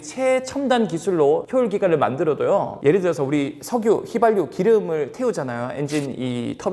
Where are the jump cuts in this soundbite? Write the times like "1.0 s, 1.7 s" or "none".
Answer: none